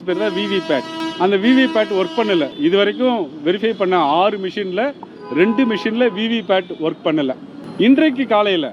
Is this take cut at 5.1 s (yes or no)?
no